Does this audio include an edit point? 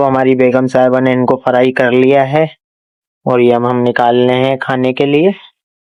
no; 0 cuts

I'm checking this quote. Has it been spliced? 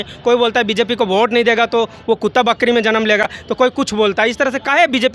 no; 0 cuts

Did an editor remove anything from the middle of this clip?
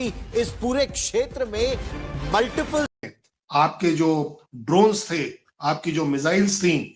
yes; 1 cut; at 2.9 s

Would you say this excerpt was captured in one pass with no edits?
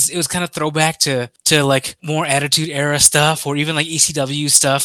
no; 2 cuts; at 1.4 s, 1.9 s

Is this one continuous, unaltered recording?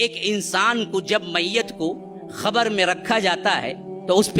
yes; 0 cuts

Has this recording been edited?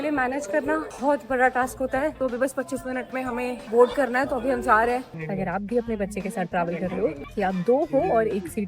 yes; 5 cuts; at 0.9 s, 2.2 s, 3.6 s, 5.2 s, 7.2 s

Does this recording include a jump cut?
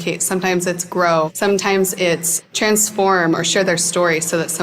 yes; 1 cut; at 1.3 s

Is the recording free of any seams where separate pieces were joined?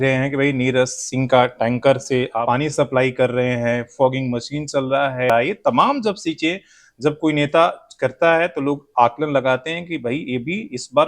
no; 2 cuts; at 2.4 s, 5.3 s

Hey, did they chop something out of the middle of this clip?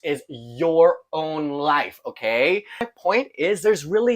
yes; 1 cut; at 2.8 s

